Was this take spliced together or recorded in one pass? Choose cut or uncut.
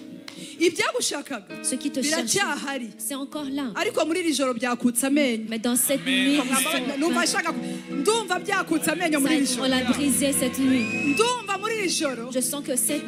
uncut